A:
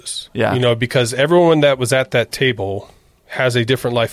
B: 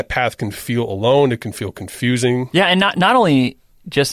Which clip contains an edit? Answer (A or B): B